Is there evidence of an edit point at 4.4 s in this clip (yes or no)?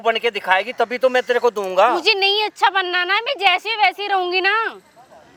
no